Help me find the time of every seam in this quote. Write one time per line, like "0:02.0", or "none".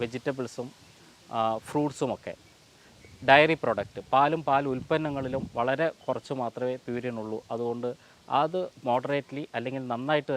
none

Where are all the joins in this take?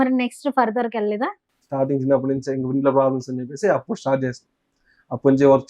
0:01.5

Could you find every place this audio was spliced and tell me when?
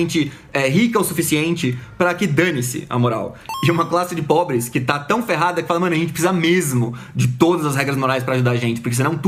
none

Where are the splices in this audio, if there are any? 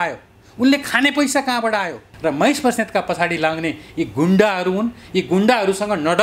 0:02.1

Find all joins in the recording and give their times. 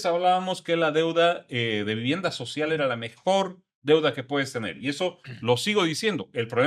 none

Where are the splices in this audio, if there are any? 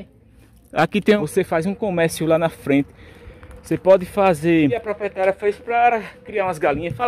0:01.2
0:05.1

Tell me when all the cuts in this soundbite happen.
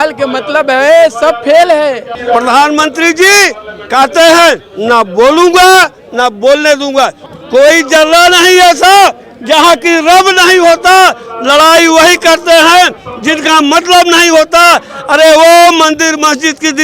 0:02.1
0:07.3

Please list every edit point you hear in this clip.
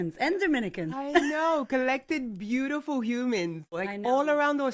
0:03.8

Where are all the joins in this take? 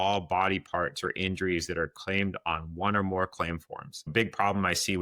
0:04.1

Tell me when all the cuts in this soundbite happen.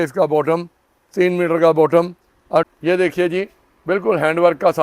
0:02.7

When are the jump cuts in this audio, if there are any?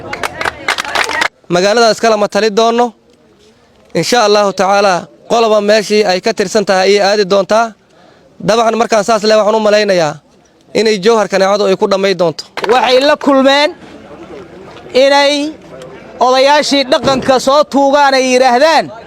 0:01.3
0:12.5

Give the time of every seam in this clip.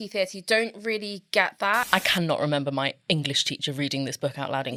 0:01.9

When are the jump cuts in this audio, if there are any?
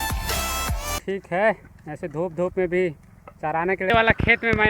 0:01.0
0:03.9

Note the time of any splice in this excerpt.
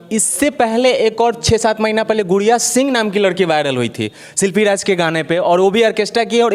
none

